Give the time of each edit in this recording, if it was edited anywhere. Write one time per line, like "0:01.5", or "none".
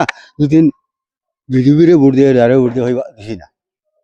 none

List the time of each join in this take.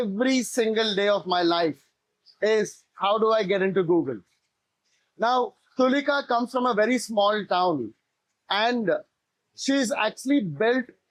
none

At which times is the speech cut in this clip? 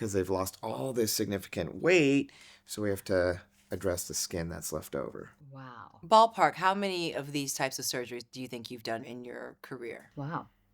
0:09.0

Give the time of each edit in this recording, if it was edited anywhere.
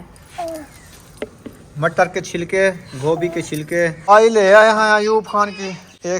0:04.1

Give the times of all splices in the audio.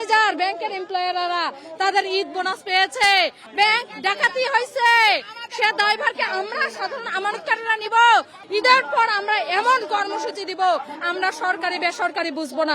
0:03.4
0:08.4

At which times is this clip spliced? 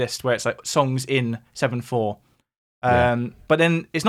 none

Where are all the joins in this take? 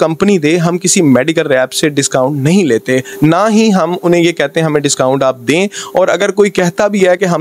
none

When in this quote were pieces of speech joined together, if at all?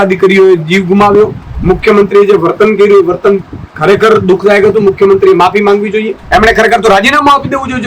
0:01.5
0:06.2

